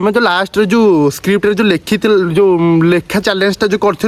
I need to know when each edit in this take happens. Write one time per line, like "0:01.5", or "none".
none